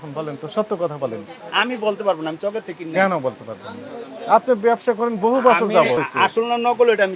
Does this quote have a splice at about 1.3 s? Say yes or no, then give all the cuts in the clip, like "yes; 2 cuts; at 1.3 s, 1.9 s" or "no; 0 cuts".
no; 0 cuts